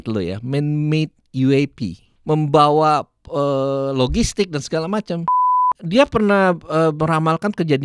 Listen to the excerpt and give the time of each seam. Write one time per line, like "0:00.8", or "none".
0:02.1
0:05.6